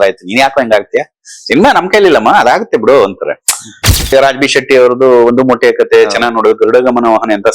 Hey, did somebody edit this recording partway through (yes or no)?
yes